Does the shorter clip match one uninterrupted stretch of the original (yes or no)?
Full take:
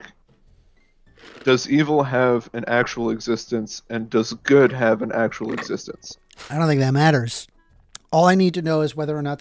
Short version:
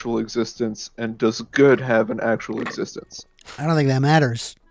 yes